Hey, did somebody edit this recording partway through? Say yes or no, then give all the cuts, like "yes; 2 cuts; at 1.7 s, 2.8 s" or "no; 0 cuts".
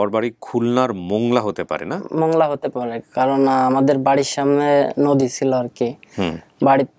no; 0 cuts